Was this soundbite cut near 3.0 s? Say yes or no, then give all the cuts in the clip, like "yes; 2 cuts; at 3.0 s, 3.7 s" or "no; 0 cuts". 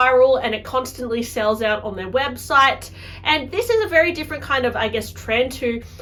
no; 0 cuts